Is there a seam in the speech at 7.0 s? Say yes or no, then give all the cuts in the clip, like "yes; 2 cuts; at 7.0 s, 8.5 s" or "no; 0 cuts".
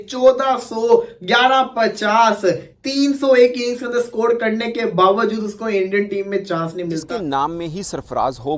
yes; 1 cut; at 7.0 s